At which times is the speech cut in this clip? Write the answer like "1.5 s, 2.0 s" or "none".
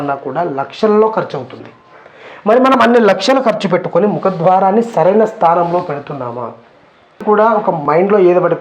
7.2 s